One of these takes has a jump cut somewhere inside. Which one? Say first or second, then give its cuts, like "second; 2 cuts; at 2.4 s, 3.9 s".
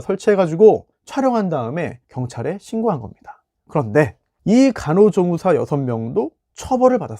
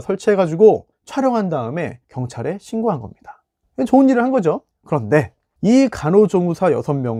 first; 1 cut; at 3.6 s